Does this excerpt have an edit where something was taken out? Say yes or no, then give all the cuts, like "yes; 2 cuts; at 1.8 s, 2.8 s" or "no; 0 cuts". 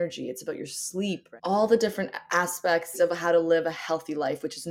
yes; 2 cuts; at 1.2 s, 2.9 s